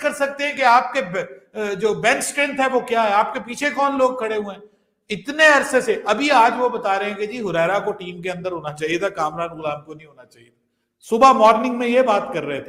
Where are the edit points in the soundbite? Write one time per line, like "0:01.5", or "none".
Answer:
none

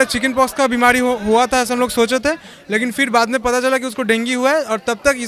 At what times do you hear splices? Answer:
none

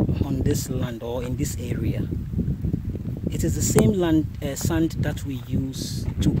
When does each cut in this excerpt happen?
none

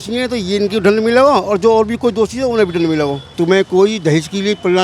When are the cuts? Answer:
none

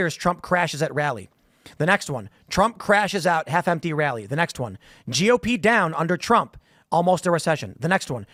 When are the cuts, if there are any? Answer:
none

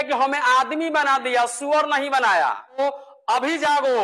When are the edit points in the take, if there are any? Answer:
0:02.8

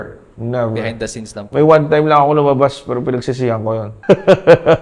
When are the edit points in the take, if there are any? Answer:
0:03.9

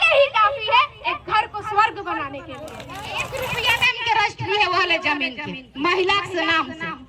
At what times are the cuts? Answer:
0:03.3

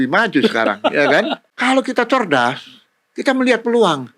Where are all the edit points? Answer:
0:01.4

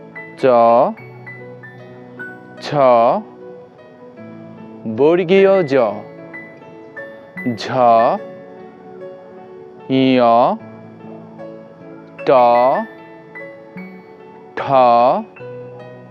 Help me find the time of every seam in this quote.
none

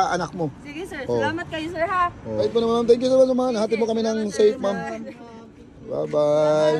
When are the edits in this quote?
0:02.4

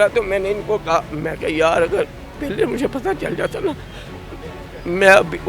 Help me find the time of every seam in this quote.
none

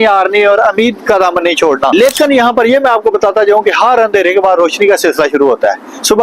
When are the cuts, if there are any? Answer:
0:01.9

